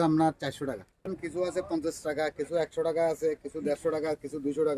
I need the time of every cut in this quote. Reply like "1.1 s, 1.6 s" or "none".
1.1 s